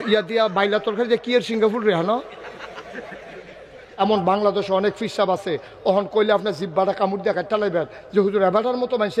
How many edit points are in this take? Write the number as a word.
one